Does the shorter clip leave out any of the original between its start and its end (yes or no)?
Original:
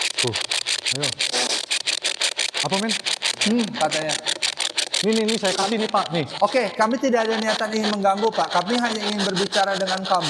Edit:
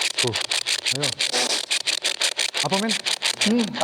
no